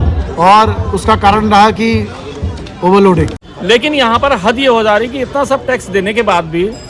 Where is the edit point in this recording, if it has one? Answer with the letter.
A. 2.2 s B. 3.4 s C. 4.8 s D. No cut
B